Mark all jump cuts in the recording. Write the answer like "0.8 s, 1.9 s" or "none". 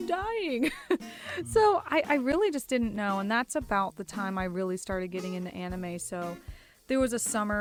none